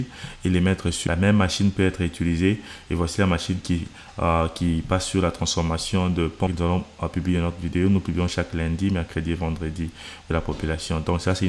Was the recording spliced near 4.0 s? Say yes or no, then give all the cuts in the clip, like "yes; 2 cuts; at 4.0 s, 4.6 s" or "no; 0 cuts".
no; 3 cuts; at 1.0 s, 6.5 s, 10.3 s